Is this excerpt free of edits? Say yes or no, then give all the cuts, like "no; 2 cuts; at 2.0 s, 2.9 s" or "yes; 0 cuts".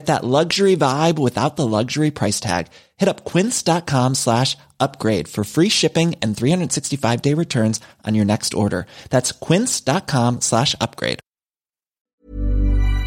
no; 1 cut; at 11.9 s